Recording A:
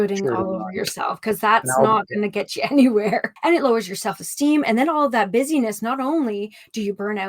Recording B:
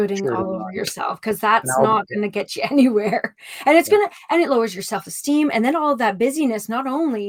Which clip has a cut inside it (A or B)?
A